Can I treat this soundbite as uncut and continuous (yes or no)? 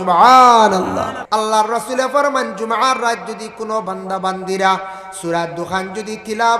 no